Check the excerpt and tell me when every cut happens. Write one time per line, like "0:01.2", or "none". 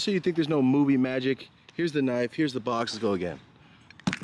none